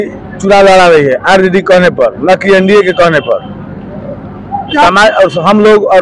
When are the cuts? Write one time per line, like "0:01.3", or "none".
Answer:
none